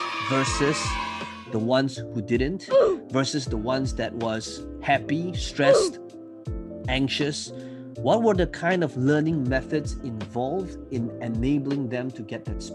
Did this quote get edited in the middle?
no; 0 cuts

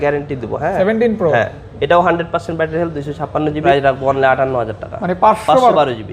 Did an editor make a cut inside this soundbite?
yes; 2 cuts; at 0.7 s, 3.6 s

